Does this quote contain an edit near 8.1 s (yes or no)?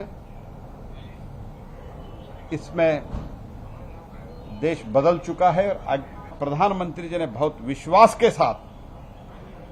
no